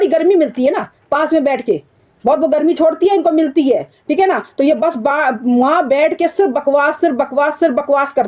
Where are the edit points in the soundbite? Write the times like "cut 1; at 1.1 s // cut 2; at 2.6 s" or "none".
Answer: none